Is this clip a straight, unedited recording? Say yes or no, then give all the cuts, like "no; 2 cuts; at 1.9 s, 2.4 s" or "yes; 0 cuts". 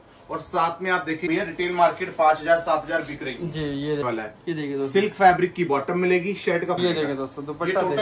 no; 3 cuts; at 1.3 s, 4.0 s, 6.8 s